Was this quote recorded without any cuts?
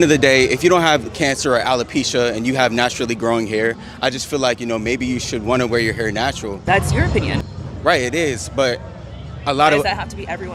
yes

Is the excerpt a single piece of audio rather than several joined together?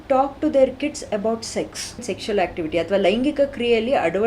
no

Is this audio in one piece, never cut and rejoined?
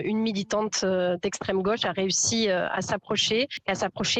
yes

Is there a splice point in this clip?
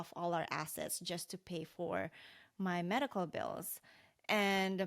no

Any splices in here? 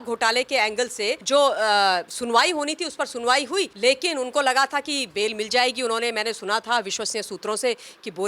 yes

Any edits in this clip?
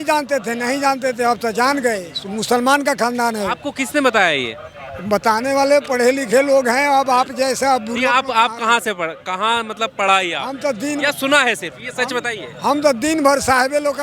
no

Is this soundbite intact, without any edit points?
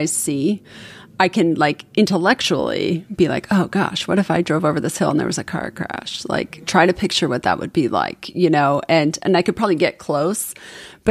yes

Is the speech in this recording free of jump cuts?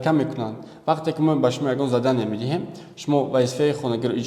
yes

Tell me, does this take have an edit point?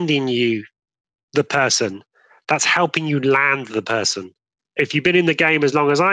yes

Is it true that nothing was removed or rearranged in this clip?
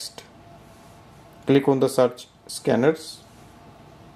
no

